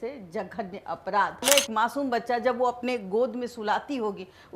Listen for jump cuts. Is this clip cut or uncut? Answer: cut